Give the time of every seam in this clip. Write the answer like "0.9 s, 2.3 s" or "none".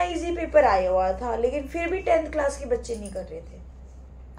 none